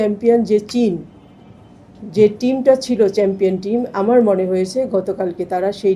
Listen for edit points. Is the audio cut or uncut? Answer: uncut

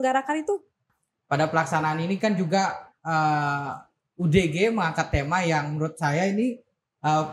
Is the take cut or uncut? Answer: cut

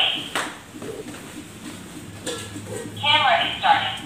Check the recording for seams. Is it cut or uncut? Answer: cut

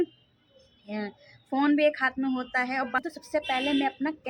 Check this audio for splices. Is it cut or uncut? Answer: cut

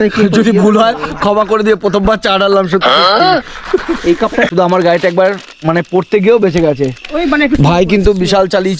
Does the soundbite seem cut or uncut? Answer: cut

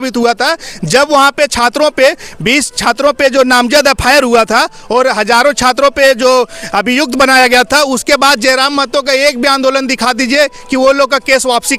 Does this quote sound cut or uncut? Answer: uncut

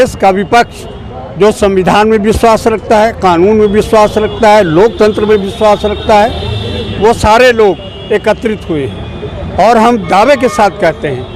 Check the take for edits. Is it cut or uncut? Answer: uncut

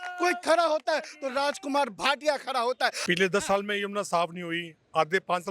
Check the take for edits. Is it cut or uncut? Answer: cut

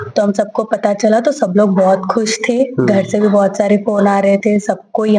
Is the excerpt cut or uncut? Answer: uncut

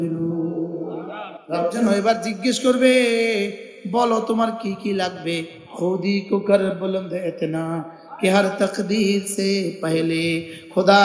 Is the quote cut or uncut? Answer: cut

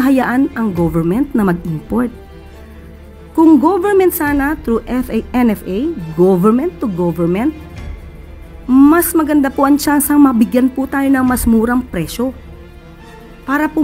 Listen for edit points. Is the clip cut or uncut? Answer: uncut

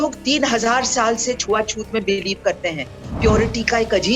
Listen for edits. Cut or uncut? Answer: uncut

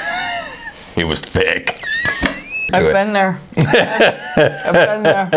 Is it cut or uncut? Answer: cut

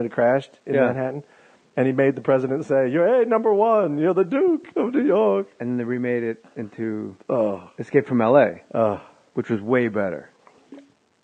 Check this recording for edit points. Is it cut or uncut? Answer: uncut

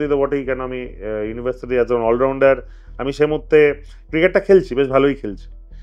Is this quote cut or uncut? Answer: uncut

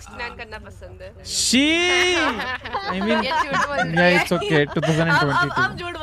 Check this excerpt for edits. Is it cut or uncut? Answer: uncut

